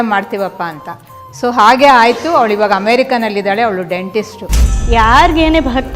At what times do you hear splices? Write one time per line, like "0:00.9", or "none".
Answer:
0:04.7